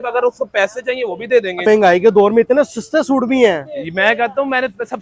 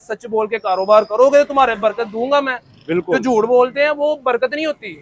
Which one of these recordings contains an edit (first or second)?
first